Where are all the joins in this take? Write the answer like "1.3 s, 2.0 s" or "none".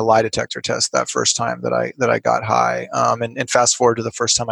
none